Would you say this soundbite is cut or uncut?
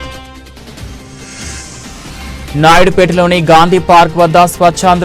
cut